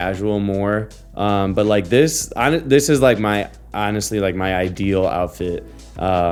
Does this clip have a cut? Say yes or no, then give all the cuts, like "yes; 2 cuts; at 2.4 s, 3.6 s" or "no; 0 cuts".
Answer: no; 0 cuts